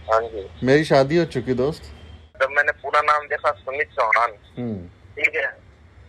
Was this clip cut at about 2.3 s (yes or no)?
yes